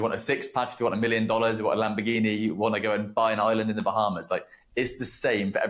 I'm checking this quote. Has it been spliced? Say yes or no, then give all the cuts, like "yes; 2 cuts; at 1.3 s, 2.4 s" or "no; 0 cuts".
no; 0 cuts